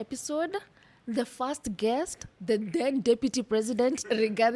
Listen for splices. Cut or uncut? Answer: uncut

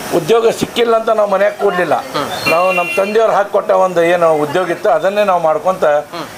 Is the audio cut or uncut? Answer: uncut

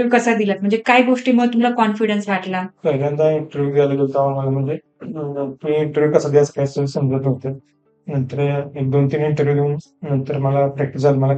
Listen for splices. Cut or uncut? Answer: cut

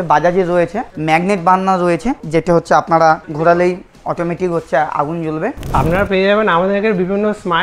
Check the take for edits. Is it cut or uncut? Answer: cut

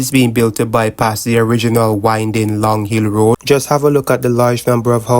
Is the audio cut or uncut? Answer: cut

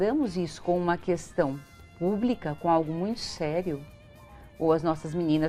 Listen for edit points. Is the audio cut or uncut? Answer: uncut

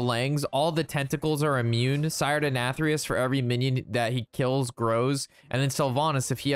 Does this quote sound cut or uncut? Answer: uncut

